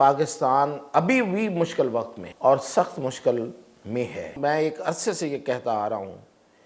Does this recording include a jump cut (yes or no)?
yes